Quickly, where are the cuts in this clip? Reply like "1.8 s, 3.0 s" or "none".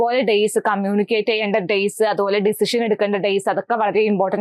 none